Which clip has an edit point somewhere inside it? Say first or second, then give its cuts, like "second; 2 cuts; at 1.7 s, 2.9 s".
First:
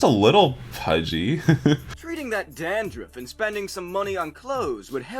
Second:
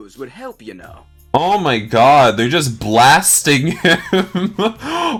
first; 1 cut; at 2.0 s